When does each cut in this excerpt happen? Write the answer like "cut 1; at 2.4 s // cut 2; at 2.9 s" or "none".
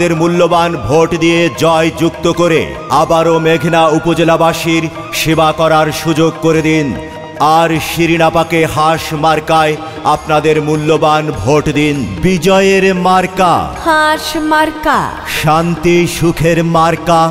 cut 1; at 12.1 s